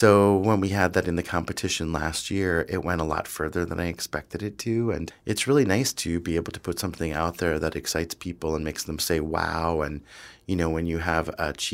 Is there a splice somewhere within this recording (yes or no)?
yes